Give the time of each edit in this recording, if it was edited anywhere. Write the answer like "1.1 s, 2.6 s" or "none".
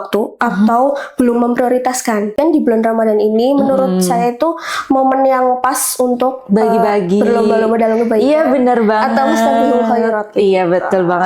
2.3 s